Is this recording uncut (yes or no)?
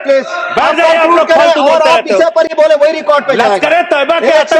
yes